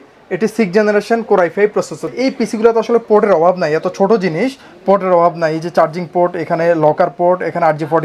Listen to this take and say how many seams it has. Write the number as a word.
one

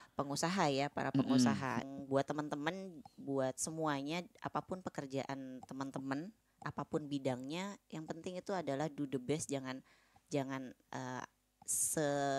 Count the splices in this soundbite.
one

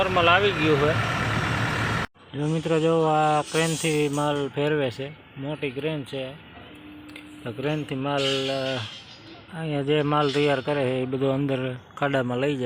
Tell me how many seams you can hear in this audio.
one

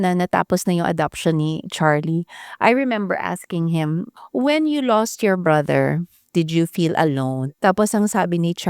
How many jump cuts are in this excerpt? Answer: three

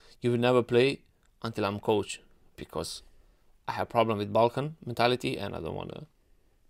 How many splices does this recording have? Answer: zero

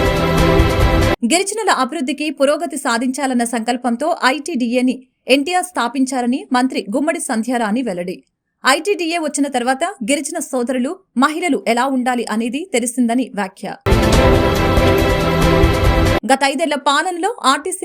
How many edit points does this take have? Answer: one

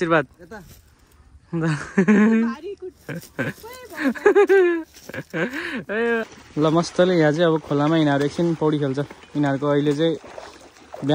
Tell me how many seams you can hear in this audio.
one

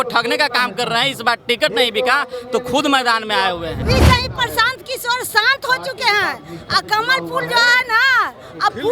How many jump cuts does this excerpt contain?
one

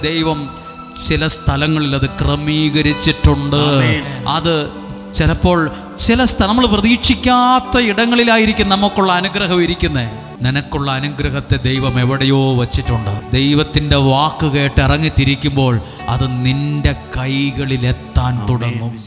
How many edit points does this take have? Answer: three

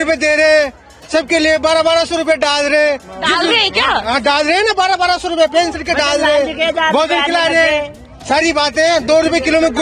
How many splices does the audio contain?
zero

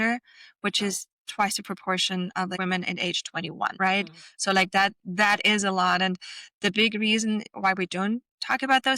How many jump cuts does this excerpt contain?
two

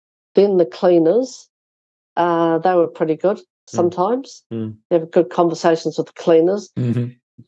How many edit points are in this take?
zero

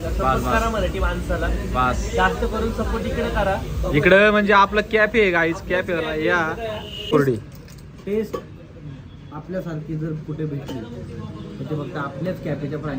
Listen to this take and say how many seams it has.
one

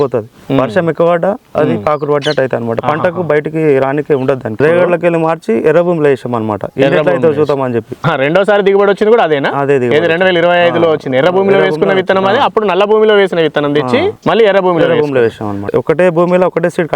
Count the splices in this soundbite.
three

